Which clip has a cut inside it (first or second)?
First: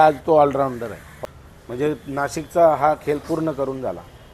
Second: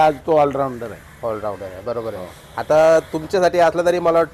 first